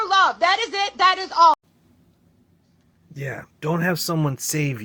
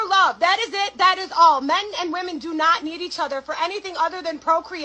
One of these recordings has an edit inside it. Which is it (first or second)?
second